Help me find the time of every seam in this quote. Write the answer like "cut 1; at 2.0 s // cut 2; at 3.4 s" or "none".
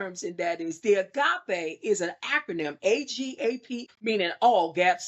cut 1; at 3.8 s